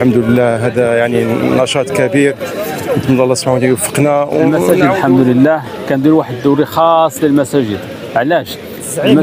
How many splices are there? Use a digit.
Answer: 1